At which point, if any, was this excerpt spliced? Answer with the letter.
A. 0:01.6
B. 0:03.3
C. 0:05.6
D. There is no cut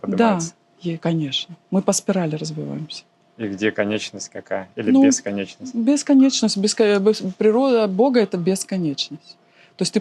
D